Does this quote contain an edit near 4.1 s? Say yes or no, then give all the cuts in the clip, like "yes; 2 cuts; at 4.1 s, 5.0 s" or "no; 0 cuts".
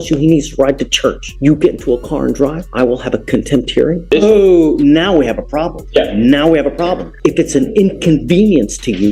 yes; 5 cuts; at 1.3 s, 2.6 s, 4.1 s, 5.8 s, 7.1 s